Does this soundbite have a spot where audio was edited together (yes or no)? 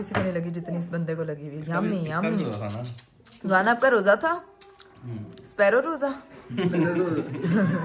no